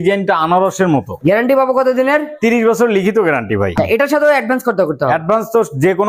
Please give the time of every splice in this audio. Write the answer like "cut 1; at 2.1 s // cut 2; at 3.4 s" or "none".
cut 1; at 1.2 s // cut 2; at 3.7 s